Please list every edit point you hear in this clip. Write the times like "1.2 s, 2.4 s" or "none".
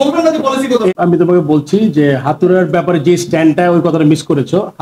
0.9 s